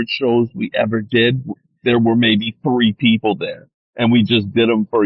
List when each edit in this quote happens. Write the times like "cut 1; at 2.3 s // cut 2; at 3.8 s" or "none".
none

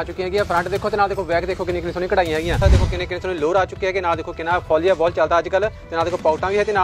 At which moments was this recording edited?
cut 1; at 2.6 s

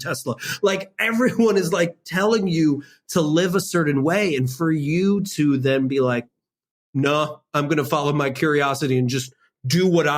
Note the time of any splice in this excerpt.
cut 1; at 6.3 s

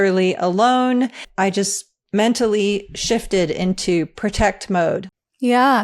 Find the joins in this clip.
cut 1; at 1.2 s

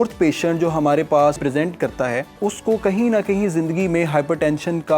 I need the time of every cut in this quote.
cut 1; at 1.4 s // cut 2; at 2.4 s

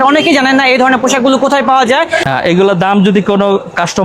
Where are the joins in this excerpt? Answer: cut 1; at 2.2 s

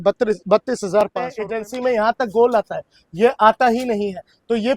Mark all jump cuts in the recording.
cut 1; at 1.4 s

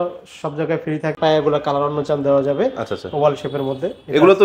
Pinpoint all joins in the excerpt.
cut 1; at 1.2 s

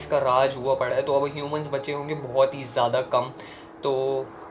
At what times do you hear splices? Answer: none

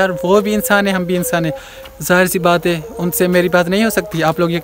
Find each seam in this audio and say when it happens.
none

